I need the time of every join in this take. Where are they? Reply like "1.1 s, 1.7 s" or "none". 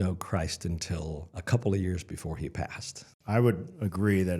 1.3 s, 3.1 s